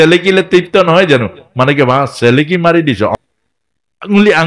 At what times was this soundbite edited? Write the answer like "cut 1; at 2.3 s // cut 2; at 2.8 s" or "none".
cut 1; at 3.1 s